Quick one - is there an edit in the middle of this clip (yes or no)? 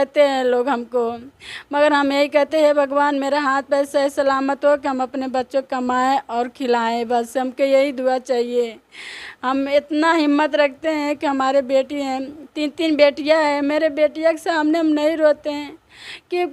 no